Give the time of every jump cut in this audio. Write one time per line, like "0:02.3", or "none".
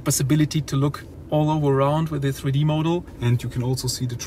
0:01.1
0:03.1